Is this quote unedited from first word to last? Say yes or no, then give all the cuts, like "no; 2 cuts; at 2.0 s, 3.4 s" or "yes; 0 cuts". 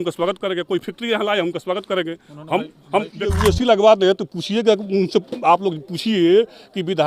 no; 1 cut; at 3.4 s